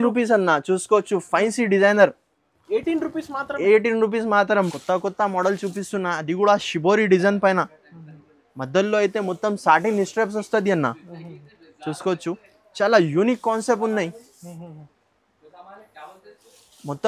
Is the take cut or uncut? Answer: cut